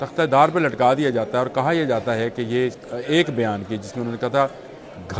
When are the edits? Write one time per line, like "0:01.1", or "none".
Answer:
0:02.8